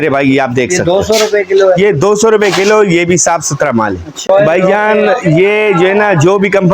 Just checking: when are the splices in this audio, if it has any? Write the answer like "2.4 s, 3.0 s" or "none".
4.3 s